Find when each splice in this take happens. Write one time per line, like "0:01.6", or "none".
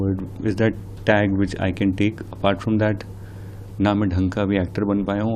none